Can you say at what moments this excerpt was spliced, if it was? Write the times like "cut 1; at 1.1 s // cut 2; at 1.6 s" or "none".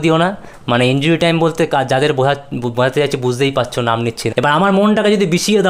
cut 1; at 4.2 s